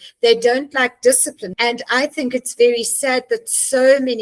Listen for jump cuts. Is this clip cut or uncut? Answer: cut